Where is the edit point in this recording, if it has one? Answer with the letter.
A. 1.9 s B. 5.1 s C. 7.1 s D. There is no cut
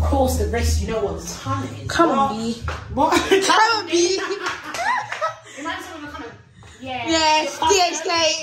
D